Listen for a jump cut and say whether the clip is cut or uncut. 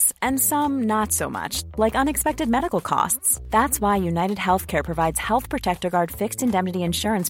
uncut